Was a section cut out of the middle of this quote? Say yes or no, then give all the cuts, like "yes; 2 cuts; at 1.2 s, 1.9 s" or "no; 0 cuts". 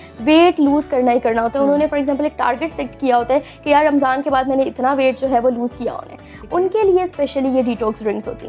no; 0 cuts